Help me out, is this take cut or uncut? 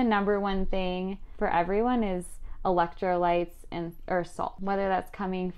cut